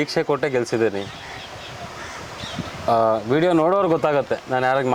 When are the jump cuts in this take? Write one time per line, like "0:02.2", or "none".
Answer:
none